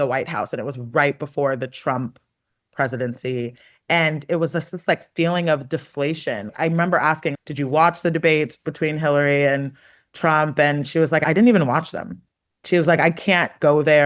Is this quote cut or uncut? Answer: cut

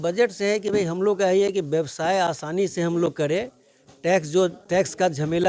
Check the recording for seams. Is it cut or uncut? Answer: uncut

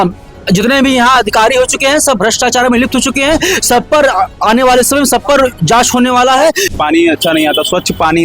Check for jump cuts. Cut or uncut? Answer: cut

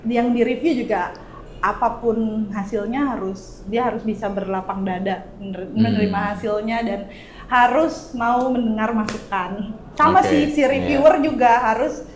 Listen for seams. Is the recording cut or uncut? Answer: uncut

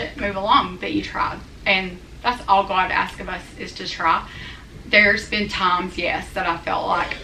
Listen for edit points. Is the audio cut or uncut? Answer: uncut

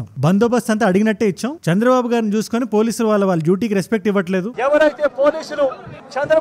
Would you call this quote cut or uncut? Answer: cut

